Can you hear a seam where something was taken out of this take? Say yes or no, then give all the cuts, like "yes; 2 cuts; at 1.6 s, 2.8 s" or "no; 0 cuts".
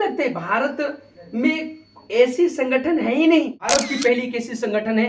yes; 1 cut; at 3.6 s